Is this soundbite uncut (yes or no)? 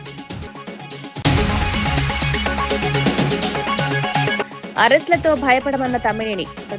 no